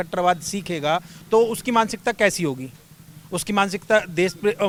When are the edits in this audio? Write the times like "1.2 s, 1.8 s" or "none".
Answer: none